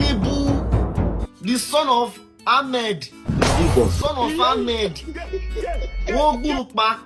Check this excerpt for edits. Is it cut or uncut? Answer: cut